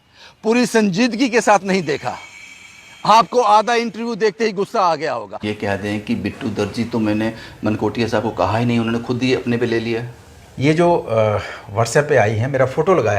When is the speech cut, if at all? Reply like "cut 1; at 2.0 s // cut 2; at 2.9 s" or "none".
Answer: cut 1; at 5.4 s